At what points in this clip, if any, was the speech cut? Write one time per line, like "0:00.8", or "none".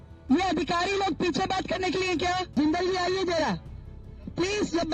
0:02.5